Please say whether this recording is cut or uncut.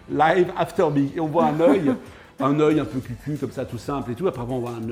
uncut